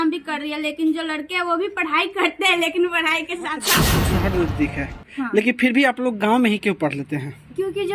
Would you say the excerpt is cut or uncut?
cut